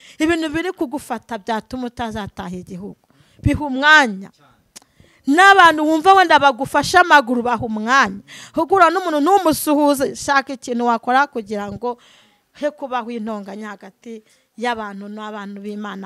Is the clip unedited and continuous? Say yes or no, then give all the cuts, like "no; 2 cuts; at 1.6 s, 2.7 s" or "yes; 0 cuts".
yes; 0 cuts